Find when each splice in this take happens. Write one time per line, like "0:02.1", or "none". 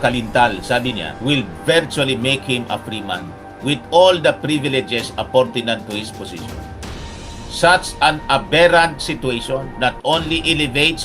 0:01.1

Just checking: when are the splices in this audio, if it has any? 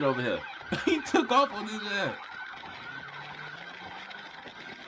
0:03.5

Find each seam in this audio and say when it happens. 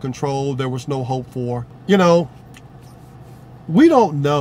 0:01.7

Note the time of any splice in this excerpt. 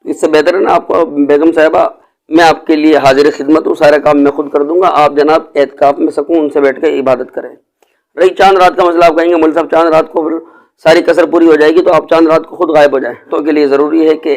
0:13.3

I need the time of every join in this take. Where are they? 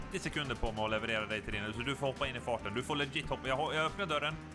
none

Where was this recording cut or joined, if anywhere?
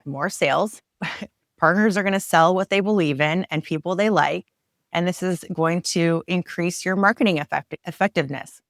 0:07.8

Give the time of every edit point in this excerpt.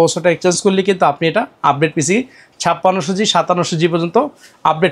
none

